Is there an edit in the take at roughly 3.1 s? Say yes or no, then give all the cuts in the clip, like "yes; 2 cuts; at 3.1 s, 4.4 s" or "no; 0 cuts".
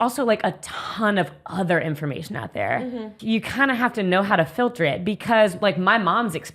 yes; 1 cut; at 3.1 s